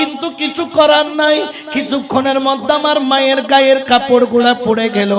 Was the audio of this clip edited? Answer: no; 0 cuts

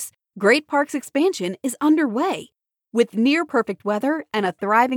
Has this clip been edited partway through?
no; 0 cuts

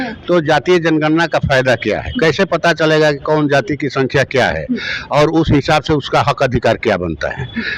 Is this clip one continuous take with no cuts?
yes; 0 cuts

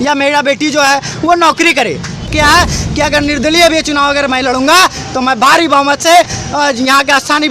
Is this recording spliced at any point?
yes; 1 cut; at 2.2 s

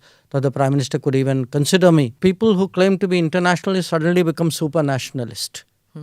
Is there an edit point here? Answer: yes; 1 cut; at 2.1 s

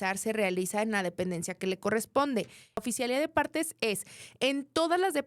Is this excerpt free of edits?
no; 1 cut; at 2.8 s

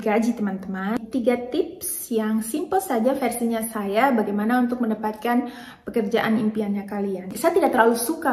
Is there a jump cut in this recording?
yes; 2 cuts; at 1.0 s, 7.3 s

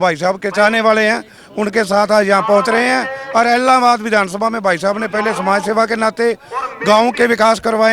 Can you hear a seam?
no; 0 cuts

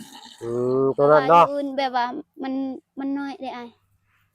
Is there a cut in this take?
yes; 1 cut; at 1.6 s

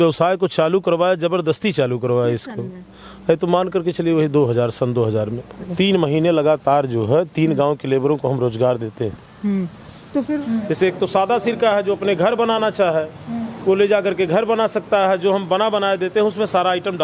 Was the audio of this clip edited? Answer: yes; 2 cuts; at 5.6 s, 10.4 s

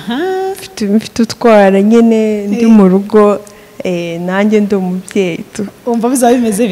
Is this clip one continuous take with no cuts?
yes; 0 cuts

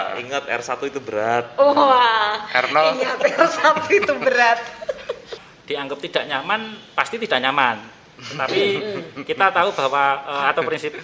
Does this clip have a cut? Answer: yes; 1 cut; at 5.4 s

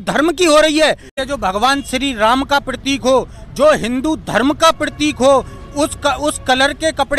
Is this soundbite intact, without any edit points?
no; 1 cut; at 1.1 s

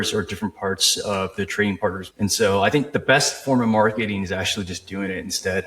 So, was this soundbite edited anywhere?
yes; 1 cut; at 2.1 s

